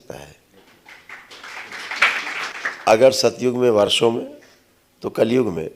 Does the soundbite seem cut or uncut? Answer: uncut